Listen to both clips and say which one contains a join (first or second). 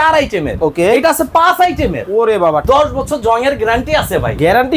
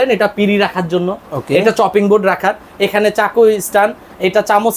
first